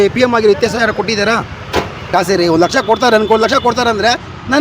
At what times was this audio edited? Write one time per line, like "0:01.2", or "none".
0:02.1